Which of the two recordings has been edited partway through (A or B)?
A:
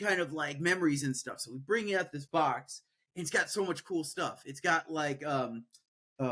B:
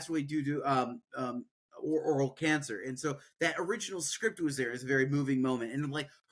A